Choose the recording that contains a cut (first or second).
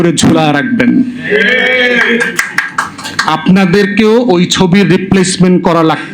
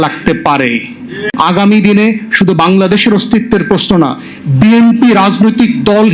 second